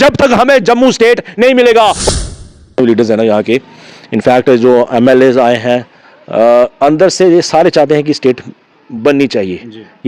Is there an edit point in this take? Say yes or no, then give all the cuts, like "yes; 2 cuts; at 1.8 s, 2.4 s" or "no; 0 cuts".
yes; 1 cut; at 2.1 s